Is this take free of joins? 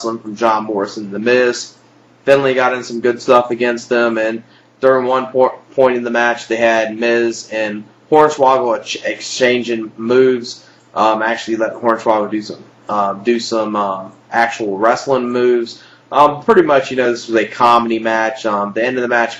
yes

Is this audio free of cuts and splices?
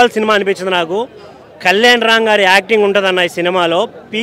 yes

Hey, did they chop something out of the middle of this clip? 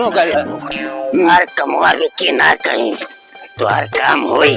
yes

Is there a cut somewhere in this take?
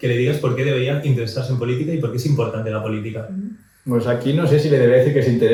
no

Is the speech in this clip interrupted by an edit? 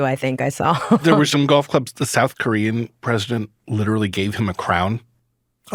no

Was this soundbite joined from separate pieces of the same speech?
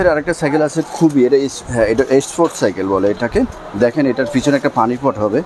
no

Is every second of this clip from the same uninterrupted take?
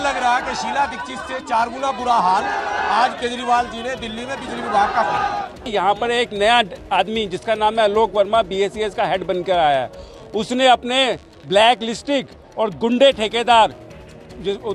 no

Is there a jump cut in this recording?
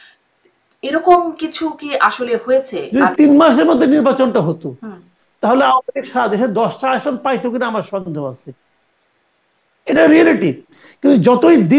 yes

